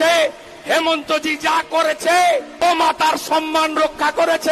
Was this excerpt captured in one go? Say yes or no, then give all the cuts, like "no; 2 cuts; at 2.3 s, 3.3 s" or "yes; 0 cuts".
no; 1 cut; at 2.5 s